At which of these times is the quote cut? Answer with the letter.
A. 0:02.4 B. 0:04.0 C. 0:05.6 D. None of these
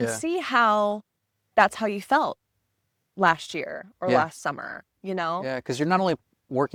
D